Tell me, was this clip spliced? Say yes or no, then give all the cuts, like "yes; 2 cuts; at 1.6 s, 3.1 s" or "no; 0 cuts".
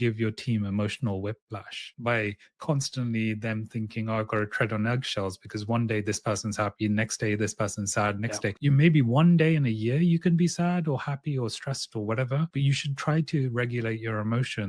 no; 0 cuts